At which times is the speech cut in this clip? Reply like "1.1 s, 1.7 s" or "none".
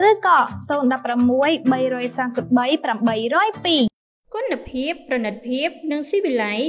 3.9 s